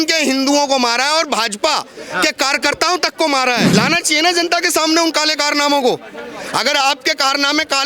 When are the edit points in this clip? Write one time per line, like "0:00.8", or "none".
0:03.7